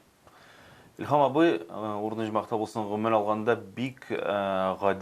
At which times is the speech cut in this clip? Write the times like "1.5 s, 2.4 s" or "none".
none